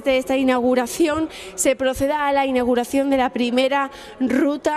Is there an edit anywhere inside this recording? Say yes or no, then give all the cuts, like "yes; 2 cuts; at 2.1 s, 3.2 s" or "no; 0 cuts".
no; 0 cuts